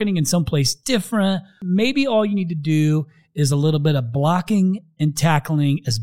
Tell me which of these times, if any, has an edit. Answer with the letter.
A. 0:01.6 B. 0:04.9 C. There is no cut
A